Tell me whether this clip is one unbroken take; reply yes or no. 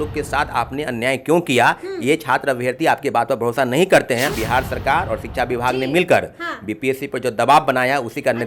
no